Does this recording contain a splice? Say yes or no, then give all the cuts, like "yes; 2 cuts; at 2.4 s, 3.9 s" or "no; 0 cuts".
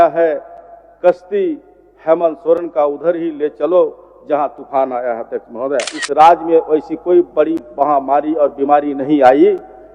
yes; 1 cut; at 6.0 s